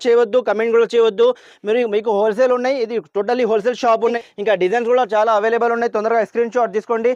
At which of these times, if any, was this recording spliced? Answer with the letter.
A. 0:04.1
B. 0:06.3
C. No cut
A